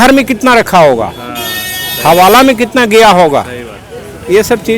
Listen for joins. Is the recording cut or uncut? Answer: uncut